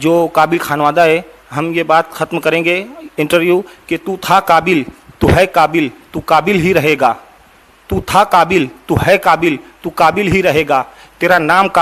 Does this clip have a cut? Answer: no; 0 cuts

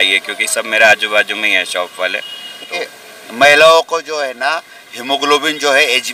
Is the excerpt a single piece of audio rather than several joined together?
no; 1 cut; at 2.8 s

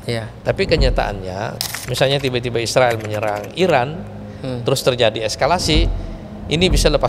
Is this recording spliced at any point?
yes; 1 cut; at 1.5 s

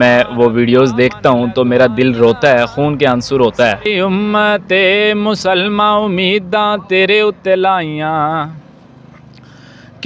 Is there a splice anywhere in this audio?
yes; 1 cut; at 3.8 s

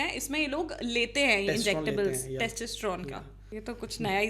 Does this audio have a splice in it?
yes; 1 cut; at 3.4 s

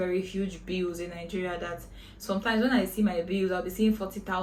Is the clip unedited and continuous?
yes; 0 cuts

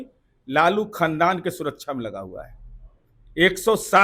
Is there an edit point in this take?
no; 0 cuts

